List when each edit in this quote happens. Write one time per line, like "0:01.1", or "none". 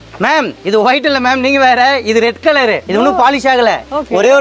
0:02.8